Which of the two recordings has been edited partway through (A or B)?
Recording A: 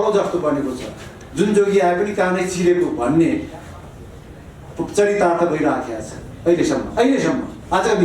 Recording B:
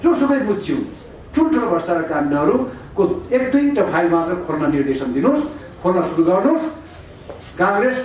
A